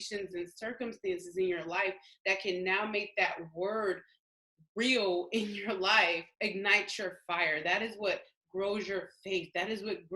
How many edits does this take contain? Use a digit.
1